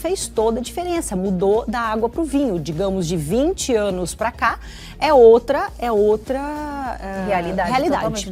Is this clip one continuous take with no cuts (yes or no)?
yes